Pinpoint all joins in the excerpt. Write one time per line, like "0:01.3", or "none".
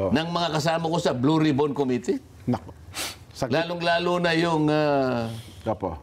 none